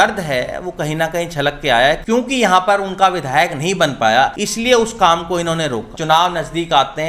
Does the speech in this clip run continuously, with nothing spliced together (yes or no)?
no